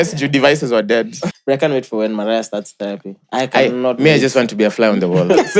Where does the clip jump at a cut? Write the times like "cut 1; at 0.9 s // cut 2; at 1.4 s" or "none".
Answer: cut 1; at 1.2 s